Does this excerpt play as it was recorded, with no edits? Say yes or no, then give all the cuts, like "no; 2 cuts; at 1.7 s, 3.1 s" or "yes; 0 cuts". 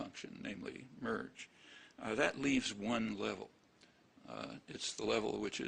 no; 1 cut; at 2.2 s